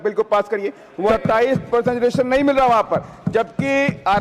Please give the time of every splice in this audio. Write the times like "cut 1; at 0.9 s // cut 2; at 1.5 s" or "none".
cut 1; at 1.1 s